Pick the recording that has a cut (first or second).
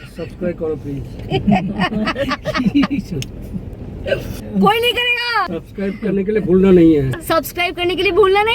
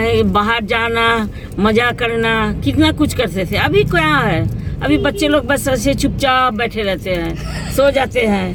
first